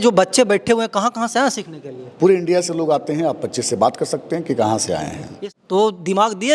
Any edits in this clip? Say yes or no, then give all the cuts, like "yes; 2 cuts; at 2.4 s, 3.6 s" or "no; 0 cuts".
yes; 1 cut; at 5.2 s